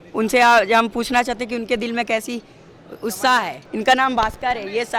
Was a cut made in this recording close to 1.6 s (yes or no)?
no